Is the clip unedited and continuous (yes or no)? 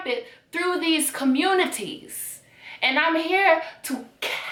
yes